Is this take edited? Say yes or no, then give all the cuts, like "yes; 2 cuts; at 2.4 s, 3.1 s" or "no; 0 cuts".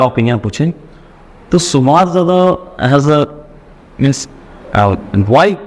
no; 0 cuts